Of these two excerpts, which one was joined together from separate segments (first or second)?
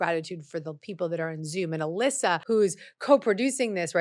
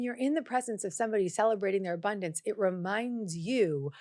first